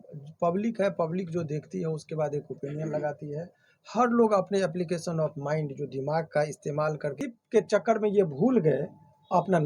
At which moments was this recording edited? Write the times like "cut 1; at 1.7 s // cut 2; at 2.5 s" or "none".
cut 1; at 7.2 s

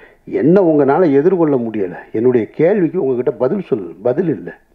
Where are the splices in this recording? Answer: none

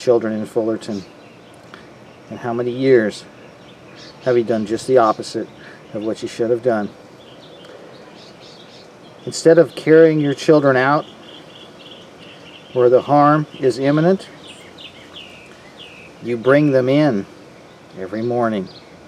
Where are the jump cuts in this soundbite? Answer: cut 1; at 15.7 s

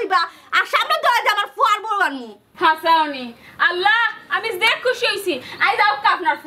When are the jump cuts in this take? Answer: none

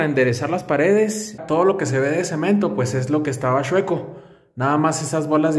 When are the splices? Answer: cut 1; at 1.4 s

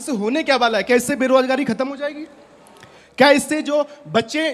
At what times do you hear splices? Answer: none

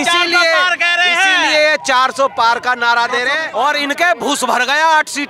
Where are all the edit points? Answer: cut 1; at 3.4 s

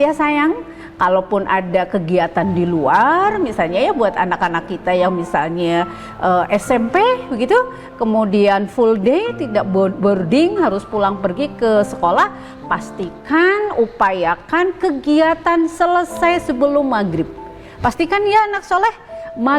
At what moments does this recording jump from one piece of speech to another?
none

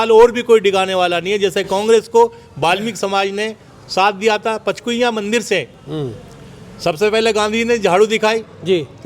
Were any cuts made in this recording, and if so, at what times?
none

